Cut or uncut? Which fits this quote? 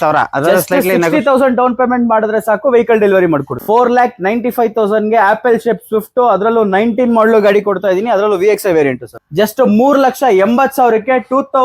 cut